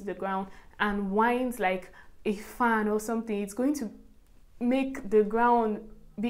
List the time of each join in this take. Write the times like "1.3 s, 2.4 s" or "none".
none